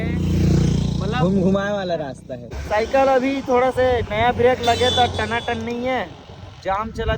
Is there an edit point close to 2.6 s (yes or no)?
yes